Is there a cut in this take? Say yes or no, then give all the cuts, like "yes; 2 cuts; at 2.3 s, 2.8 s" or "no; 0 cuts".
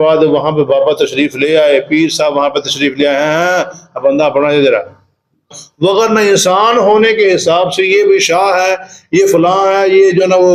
yes; 1 cut; at 5.6 s